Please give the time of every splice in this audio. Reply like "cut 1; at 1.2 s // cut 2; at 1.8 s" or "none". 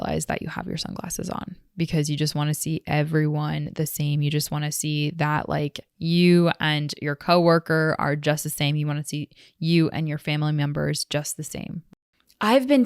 cut 1; at 11.9 s